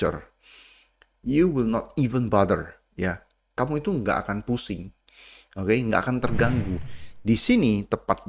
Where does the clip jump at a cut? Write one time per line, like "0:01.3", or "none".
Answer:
0:06.8